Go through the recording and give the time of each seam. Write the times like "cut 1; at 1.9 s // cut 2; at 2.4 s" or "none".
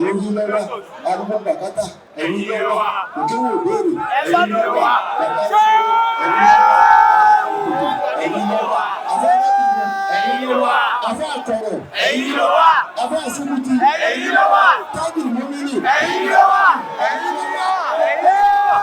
none